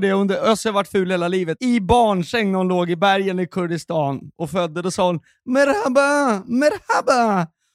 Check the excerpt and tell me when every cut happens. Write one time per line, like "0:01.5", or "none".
0:01.6